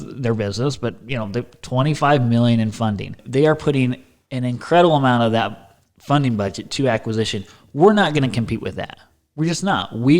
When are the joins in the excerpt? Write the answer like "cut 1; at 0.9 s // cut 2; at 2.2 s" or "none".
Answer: cut 1; at 3.2 s